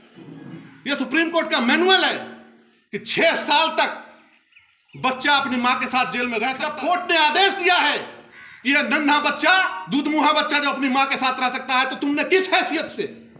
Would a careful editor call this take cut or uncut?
cut